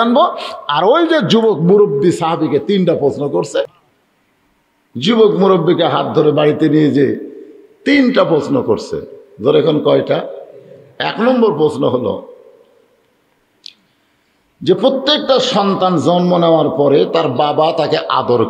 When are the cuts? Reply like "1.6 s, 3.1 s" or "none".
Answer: 3.8 s